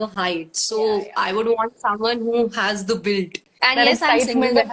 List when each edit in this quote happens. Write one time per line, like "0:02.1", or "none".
0:03.5